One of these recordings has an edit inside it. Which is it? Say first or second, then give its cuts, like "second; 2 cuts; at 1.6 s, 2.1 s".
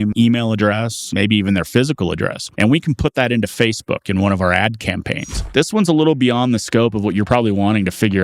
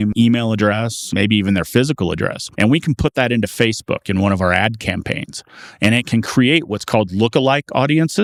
first; 1 cut; at 5.4 s